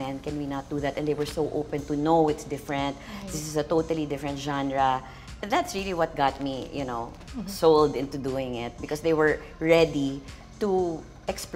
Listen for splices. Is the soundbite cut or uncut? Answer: uncut